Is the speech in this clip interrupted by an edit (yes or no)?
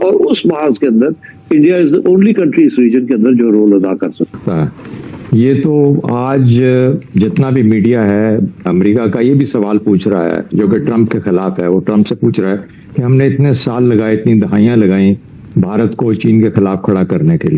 yes